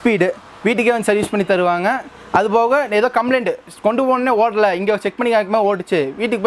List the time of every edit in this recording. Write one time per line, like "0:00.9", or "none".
none